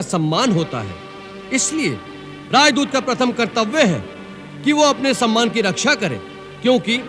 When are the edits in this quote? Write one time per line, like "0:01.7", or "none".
none